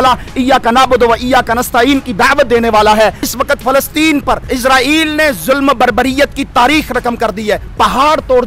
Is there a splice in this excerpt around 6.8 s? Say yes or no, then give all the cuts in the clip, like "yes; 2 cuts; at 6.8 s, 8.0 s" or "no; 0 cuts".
no; 2 cuts; at 3.3 s, 4.4 s